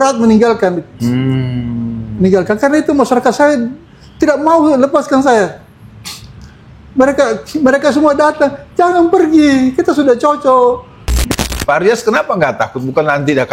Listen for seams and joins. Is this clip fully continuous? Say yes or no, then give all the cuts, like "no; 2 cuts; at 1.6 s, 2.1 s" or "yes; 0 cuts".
no; 1 cut; at 11.2 s